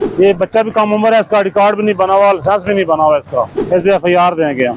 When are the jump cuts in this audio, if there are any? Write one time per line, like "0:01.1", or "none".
0:03.6